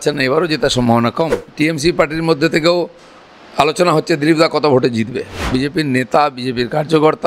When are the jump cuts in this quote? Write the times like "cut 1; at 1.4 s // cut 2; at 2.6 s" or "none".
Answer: cut 1; at 1.5 s // cut 2; at 5.5 s